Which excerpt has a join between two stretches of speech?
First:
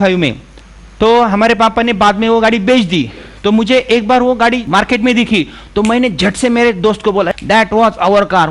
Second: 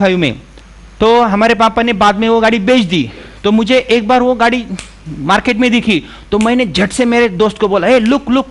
first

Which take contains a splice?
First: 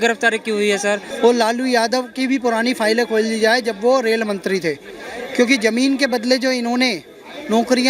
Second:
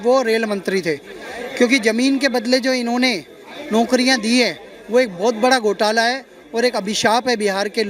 first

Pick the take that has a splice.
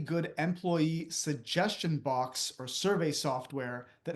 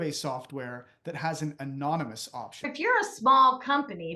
second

